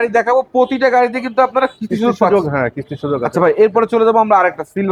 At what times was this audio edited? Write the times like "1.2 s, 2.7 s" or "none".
none